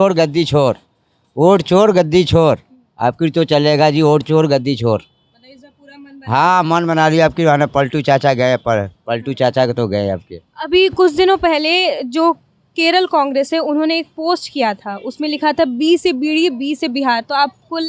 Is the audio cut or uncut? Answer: uncut